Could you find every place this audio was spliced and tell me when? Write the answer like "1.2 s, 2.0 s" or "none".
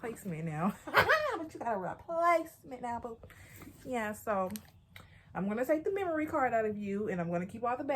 none